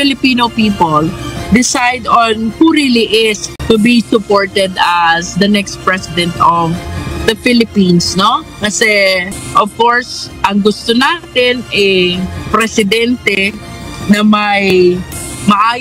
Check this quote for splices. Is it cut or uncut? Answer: cut